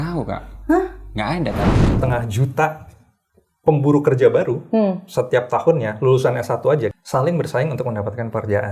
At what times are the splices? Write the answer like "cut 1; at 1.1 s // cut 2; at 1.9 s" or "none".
cut 1; at 2.0 s // cut 2; at 6.9 s